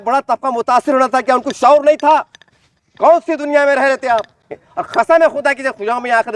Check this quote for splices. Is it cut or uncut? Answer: cut